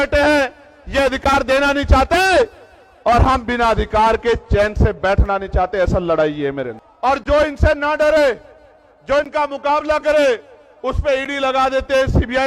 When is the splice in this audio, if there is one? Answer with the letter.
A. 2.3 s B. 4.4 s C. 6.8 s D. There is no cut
C